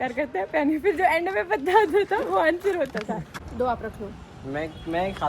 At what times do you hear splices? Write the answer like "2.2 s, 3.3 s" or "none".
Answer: 3.4 s